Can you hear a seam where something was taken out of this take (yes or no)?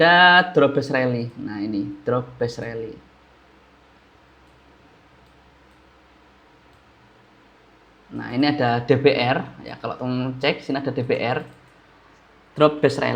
no